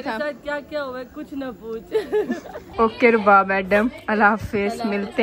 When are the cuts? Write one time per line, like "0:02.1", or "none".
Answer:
0:02.6